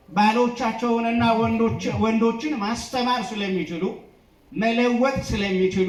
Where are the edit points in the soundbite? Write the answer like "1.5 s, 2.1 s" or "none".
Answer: none